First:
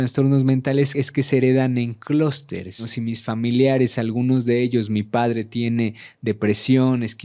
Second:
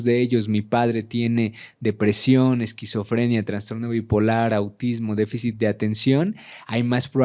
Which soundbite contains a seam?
first; 2 cuts; at 0.9 s, 2.9 s

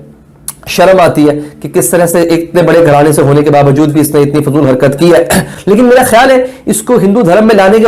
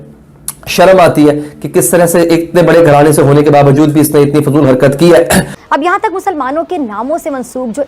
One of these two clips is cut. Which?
second; 1 cut; at 5.5 s

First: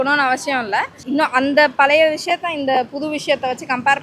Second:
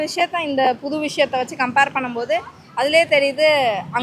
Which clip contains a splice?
first; 1 cut; at 1.0 s

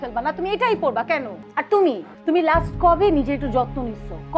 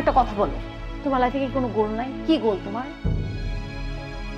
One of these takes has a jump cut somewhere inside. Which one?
first; 2 cuts; at 1.4 s, 2.1 s

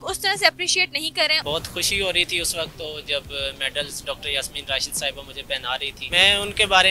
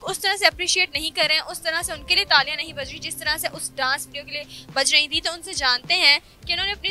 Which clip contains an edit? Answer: first; 2 cuts; at 1.4 s, 6.0 s

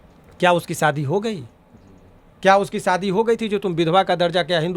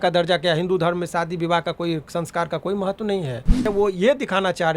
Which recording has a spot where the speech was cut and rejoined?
second; 1 cut; at 3.6 s

